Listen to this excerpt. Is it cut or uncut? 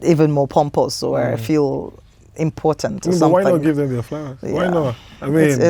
uncut